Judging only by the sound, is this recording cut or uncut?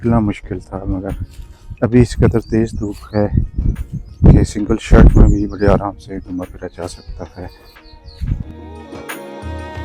uncut